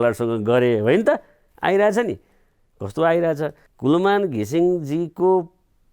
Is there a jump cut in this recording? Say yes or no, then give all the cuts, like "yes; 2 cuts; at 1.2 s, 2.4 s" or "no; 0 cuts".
yes; 1 cut; at 3.7 s